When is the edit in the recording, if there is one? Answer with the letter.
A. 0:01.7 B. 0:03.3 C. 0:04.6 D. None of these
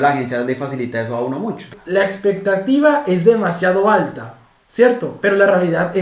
A